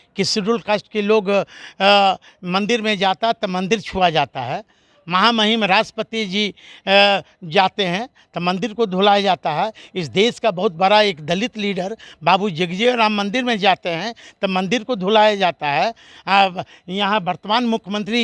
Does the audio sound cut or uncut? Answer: uncut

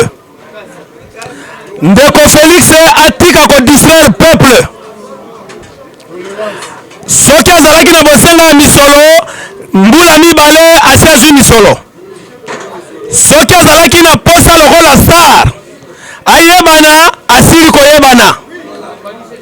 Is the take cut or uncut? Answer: uncut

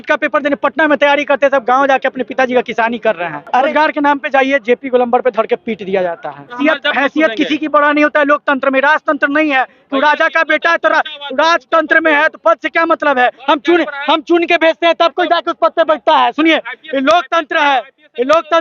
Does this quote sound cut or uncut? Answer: cut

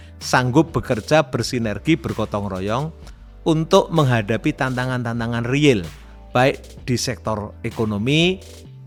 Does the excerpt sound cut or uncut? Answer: uncut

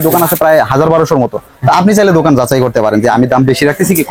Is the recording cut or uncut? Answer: uncut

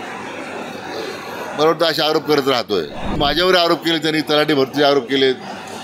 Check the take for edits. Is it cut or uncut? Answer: cut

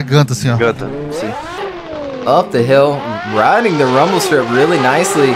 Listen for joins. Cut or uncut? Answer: cut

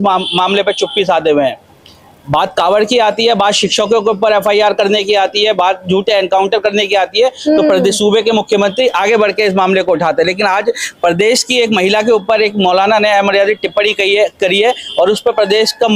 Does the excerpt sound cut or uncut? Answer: uncut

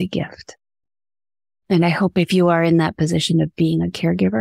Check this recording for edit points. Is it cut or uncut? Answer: uncut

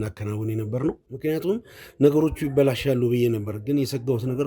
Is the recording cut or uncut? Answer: cut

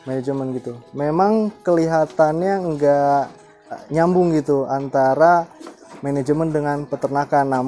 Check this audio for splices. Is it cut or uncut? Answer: cut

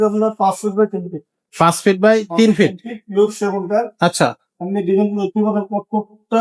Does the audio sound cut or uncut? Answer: uncut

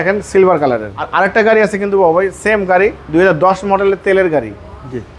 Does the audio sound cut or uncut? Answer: cut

